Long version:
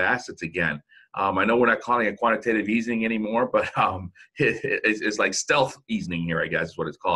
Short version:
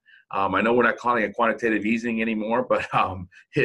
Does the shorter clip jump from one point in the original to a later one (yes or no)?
no